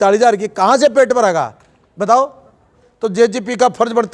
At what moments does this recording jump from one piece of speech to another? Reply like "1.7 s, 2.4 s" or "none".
2.8 s